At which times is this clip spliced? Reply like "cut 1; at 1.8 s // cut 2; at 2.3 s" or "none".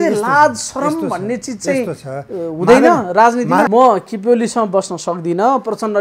cut 1; at 3.7 s